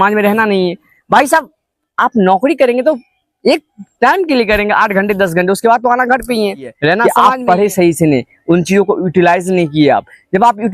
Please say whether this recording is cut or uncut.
cut